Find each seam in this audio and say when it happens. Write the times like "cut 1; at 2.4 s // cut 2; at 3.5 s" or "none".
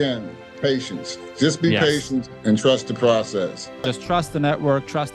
cut 1; at 4.0 s